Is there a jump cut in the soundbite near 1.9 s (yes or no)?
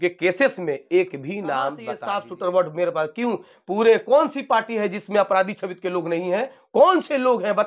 yes